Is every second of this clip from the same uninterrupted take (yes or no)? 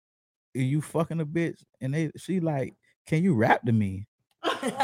yes